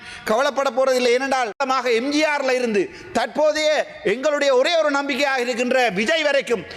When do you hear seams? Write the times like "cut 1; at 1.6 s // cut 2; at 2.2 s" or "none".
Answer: cut 1; at 1.5 s